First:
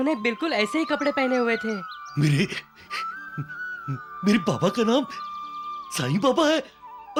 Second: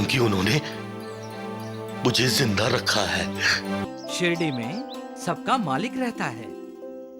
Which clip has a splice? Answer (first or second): second